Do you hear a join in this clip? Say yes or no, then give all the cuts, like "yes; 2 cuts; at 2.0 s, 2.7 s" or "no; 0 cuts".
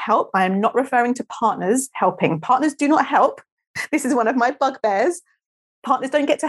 no; 0 cuts